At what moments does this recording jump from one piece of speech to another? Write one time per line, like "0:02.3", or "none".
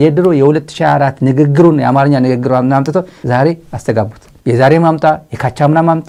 none